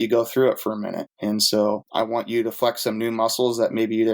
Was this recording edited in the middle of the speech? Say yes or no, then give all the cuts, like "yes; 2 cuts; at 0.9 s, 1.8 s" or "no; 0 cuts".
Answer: yes; 2 cuts; at 1.1 s, 1.9 s